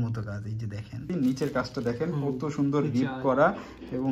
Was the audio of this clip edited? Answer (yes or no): yes